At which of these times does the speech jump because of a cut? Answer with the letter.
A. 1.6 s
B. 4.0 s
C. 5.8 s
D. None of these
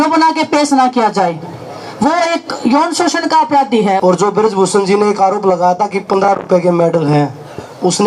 B